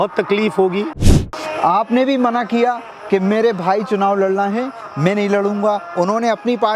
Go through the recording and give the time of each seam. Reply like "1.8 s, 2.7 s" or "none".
1.1 s

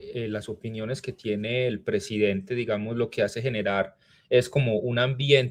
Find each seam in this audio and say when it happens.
none

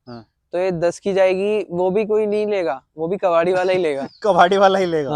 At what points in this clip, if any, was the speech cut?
none

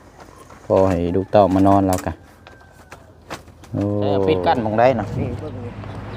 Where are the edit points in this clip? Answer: 4.4 s

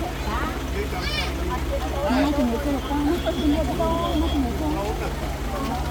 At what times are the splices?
none

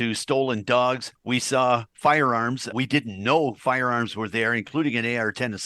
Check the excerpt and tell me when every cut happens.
1.1 s, 2.7 s

